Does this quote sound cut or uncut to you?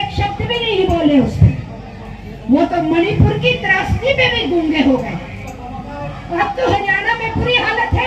uncut